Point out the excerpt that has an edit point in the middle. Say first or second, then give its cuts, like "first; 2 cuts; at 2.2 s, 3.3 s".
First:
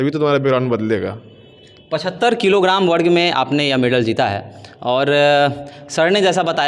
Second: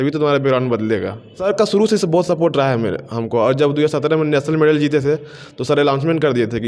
second; 1 cut; at 1.4 s